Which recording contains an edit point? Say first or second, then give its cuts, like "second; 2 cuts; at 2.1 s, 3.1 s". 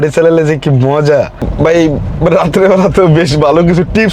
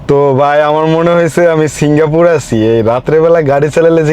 first; 1 cut; at 1.5 s